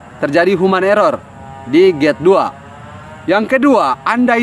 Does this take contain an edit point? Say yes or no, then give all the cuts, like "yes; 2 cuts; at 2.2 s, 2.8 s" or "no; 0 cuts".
no; 0 cuts